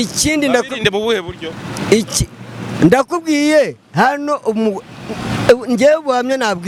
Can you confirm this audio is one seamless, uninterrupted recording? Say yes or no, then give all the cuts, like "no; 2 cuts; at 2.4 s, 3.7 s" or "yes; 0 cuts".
yes; 0 cuts